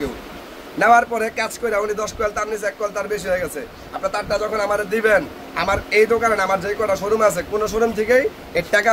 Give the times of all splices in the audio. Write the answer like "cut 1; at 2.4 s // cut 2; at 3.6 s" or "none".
none